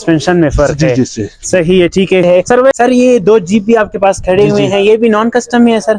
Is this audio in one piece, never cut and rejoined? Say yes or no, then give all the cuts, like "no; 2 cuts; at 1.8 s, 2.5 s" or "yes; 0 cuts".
no; 1 cut; at 2.7 s